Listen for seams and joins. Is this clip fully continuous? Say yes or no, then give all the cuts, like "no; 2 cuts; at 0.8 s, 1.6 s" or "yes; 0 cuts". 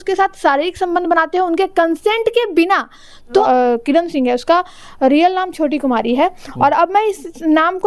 no; 1 cut; at 3.4 s